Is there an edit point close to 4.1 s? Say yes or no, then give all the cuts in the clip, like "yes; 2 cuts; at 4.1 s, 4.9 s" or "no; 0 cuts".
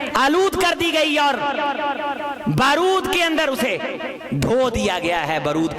yes; 1 cut; at 4.1 s